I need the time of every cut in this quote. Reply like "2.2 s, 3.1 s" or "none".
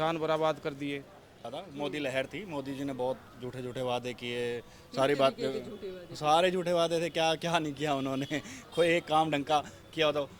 1.6 s